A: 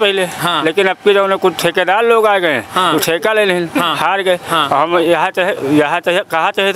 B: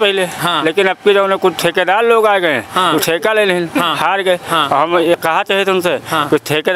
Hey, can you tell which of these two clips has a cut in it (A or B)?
B